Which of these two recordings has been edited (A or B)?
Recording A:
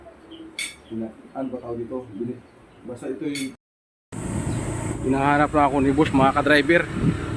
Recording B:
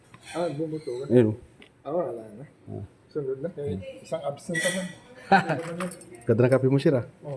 A